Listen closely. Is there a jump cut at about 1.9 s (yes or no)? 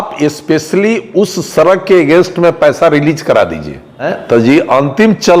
no